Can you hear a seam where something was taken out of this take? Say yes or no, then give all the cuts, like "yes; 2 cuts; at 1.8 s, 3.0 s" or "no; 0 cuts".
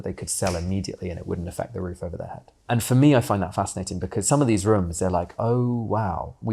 yes; 1 cut; at 2.5 s